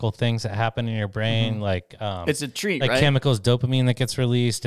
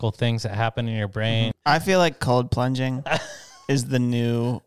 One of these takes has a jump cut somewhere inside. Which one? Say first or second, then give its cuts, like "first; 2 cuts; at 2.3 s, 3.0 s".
second; 1 cut; at 1.5 s